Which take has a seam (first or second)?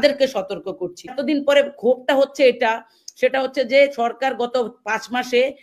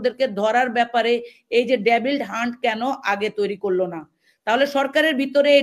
first